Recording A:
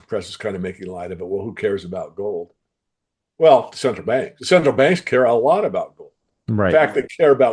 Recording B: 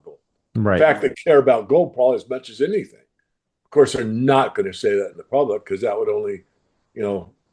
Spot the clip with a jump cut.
A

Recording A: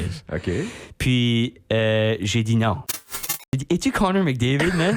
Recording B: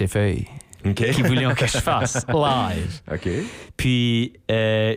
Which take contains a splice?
A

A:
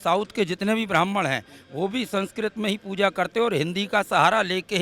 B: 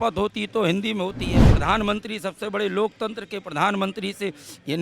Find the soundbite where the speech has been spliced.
B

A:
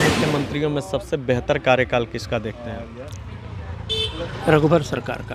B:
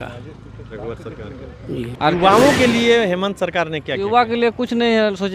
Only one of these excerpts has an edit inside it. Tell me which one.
B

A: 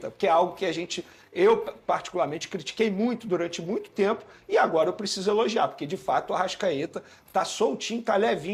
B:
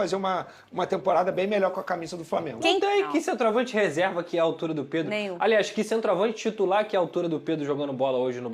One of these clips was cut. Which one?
B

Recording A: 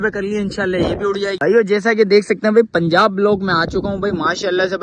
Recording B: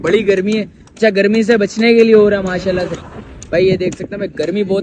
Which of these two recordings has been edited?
A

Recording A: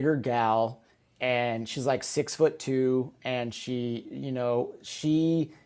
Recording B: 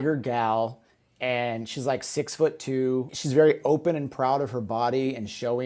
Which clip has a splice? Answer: B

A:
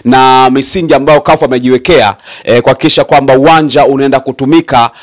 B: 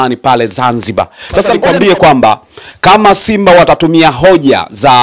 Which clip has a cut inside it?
B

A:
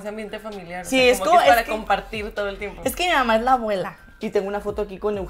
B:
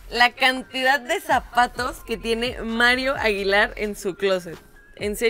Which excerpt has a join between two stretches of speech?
A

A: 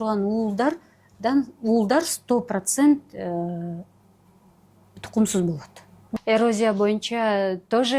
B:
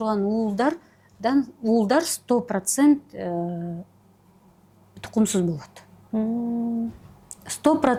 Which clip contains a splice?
A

